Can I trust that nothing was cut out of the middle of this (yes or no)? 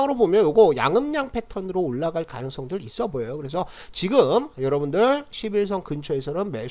yes